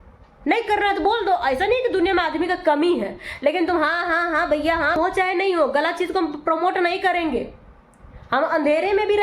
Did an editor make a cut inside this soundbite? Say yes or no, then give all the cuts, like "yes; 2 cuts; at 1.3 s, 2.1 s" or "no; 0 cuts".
yes; 1 cut; at 5.0 s